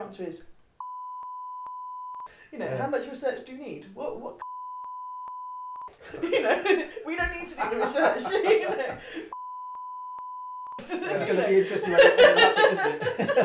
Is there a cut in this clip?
no; 0 cuts

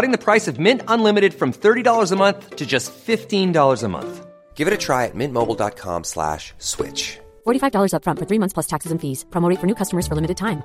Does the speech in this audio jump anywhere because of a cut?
no; 0 cuts

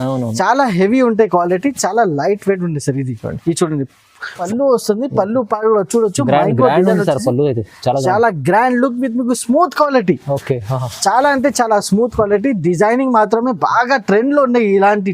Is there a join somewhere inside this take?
yes; 1 cut; at 4.5 s

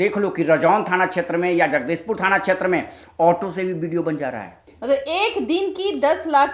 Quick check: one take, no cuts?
no; 1 cut; at 4.6 s

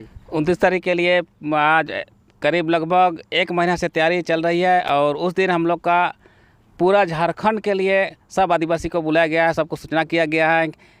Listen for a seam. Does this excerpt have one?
no; 0 cuts

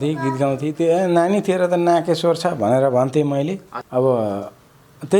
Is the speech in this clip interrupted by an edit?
yes; 1 cut; at 3.7 s

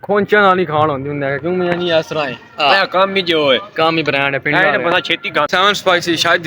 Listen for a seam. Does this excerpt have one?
yes; 1 cut; at 5.5 s

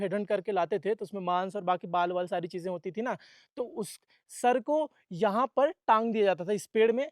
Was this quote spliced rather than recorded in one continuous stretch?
no; 0 cuts

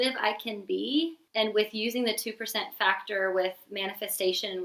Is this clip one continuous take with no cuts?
no; 1 cut; at 1.2 s

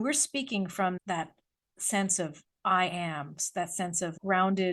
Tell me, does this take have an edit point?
yes; 1 cut; at 1.0 s

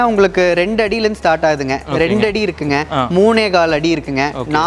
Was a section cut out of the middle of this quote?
no; 0 cuts

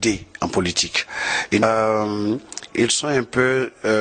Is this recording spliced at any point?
yes; 1 cut; at 1.6 s

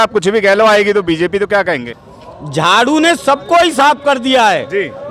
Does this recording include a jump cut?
yes; 1 cut; at 2.0 s

